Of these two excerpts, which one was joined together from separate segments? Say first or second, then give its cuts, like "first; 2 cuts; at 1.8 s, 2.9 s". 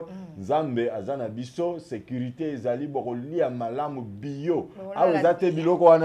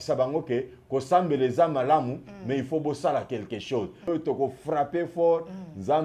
second; 1 cut; at 4.1 s